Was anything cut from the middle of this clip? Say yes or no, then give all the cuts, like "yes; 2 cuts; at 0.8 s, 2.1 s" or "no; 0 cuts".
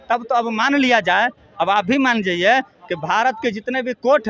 no; 0 cuts